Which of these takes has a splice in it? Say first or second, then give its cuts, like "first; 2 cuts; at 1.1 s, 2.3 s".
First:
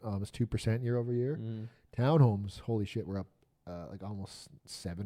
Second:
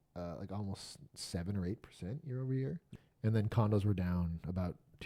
second; 1 cut; at 2.9 s